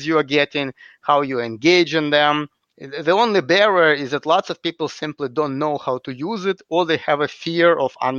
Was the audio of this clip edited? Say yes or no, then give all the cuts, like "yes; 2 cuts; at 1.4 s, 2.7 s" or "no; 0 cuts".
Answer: no; 0 cuts